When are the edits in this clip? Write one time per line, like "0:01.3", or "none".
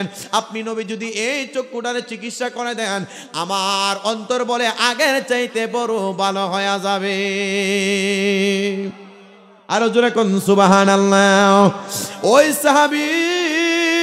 none